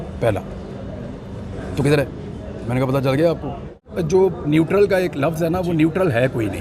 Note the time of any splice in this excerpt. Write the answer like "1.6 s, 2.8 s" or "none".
3.8 s

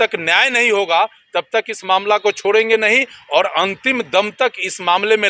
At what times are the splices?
none

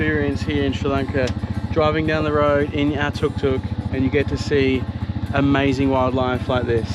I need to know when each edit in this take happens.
none

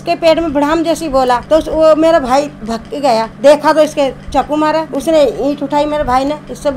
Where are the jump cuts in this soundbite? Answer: none

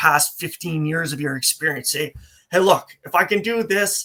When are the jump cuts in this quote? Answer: none

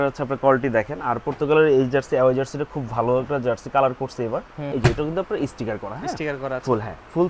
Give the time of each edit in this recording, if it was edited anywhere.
4.7 s

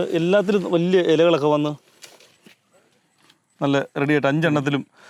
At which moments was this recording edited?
none

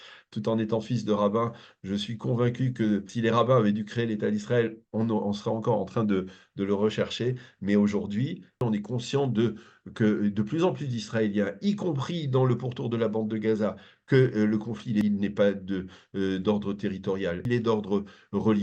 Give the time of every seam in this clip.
3.1 s, 8.6 s, 15.0 s, 17.4 s

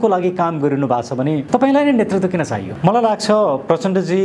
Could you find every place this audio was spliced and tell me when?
1.4 s, 2.7 s

